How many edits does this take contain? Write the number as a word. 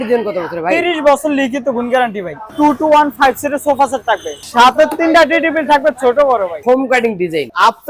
three